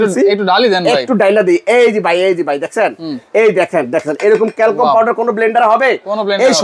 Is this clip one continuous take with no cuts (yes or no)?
yes